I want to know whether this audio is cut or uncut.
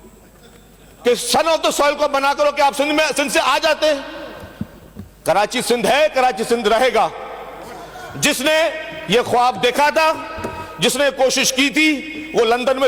uncut